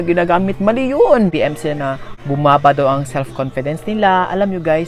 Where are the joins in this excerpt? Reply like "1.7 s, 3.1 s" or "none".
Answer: 1.3 s